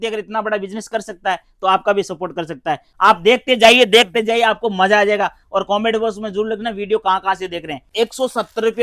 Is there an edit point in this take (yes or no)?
yes